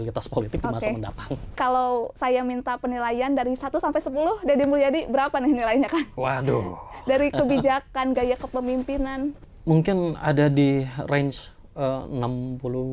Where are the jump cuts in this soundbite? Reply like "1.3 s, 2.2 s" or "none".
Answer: 1.6 s, 9.4 s